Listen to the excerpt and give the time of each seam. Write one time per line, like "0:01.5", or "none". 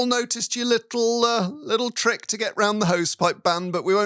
none